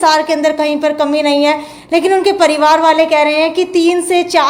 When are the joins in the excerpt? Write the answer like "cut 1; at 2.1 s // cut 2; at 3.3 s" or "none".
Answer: none